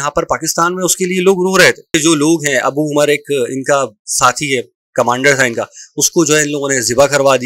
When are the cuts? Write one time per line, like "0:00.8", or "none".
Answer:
0:02.0